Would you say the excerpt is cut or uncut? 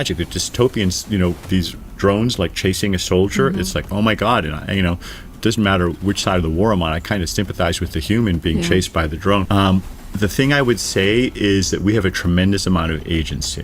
cut